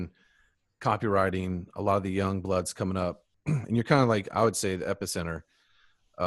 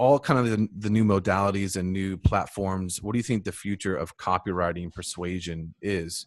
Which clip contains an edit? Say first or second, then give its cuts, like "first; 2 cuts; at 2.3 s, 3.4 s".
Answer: first; 1 cut; at 3.3 s